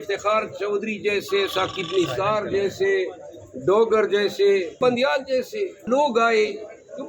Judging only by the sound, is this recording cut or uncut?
cut